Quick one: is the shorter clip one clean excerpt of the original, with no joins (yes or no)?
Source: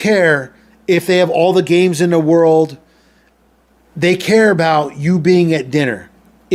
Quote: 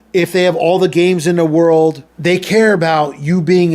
no